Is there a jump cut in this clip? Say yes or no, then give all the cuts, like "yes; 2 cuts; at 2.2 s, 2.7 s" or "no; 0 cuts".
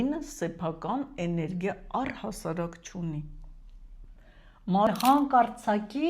yes; 1 cut; at 4.9 s